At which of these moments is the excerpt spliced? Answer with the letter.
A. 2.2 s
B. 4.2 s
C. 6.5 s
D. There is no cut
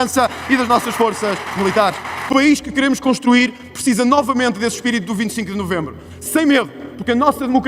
A